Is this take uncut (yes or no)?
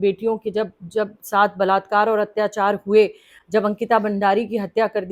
yes